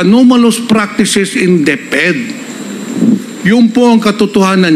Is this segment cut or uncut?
uncut